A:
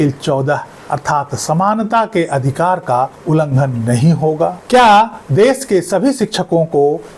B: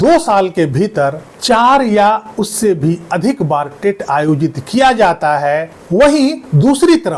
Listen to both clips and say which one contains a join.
B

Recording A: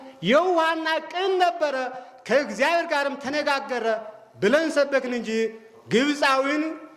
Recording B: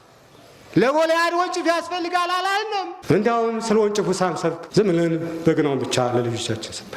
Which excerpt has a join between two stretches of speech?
B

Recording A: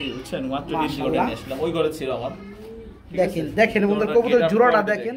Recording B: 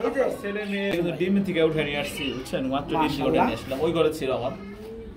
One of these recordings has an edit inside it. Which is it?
B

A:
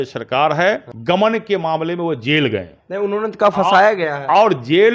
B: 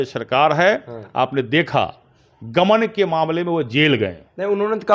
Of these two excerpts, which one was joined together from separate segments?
A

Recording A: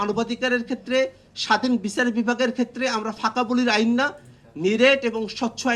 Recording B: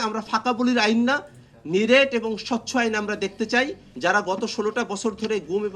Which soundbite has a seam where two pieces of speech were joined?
B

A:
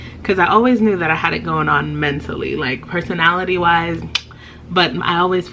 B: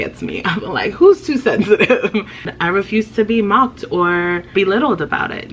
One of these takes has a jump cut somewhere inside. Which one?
B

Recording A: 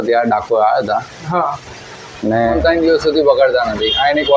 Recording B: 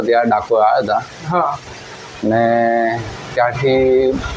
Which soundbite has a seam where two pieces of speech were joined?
A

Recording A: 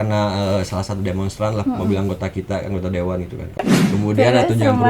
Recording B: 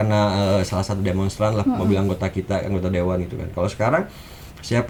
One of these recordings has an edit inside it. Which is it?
A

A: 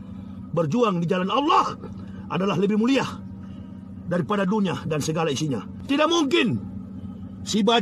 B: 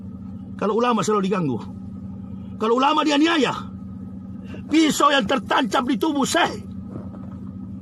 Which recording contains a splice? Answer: A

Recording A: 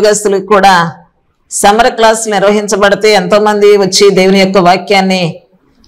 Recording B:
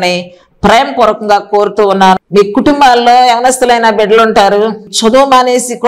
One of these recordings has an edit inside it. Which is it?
B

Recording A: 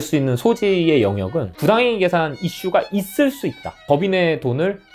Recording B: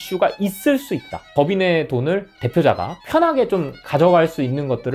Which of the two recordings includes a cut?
A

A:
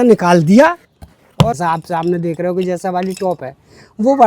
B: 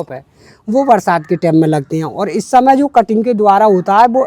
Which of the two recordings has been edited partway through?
A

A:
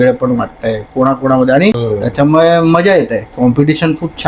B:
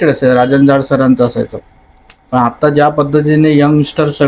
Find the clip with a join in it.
A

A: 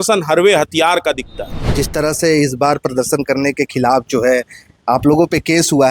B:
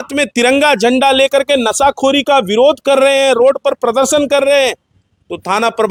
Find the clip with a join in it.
A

